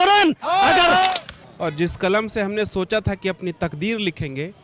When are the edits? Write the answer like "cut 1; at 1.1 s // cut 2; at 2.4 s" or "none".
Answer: cut 1; at 1.1 s